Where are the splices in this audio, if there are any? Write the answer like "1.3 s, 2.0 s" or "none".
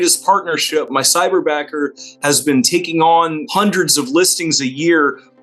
3.4 s